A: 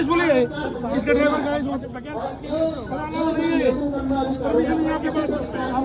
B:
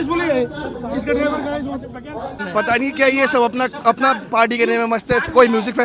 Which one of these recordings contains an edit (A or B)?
B